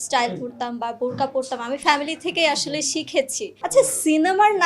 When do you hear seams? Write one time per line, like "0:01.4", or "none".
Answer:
0:03.6